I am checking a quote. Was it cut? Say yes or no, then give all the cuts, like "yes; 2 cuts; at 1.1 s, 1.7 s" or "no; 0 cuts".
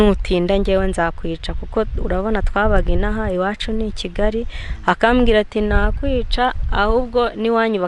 no; 0 cuts